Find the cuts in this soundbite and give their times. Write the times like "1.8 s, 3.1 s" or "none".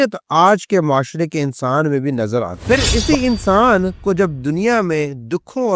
2.5 s

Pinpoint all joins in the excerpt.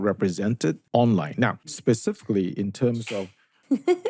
0.8 s, 1.7 s

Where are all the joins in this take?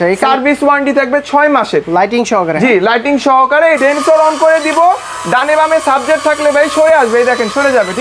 3.8 s

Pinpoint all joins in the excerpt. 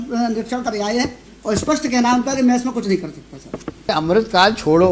3.9 s

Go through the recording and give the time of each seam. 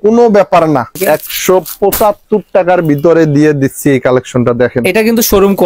0.9 s

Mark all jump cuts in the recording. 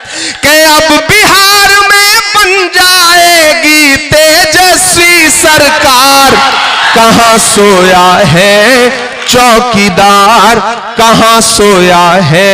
none

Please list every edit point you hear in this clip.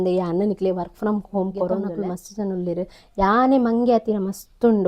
1.9 s

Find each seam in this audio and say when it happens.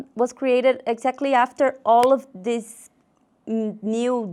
none

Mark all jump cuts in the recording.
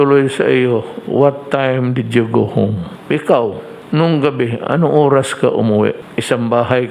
2.9 s, 3.7 s, 6.1 s

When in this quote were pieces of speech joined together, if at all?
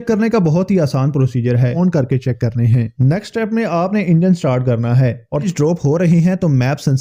1.8 s, 5.5 s

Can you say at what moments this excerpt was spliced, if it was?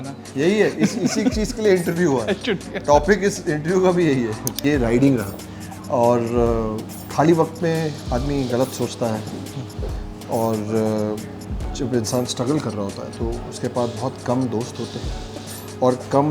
4.6 s

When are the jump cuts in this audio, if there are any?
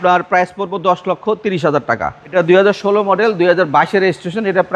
2.3 s

